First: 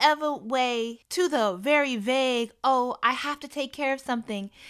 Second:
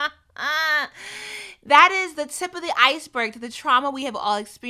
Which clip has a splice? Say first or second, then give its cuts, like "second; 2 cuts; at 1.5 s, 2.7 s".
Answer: first; 1 cut; at 1.0 s